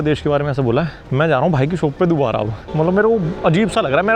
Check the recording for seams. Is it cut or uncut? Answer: cut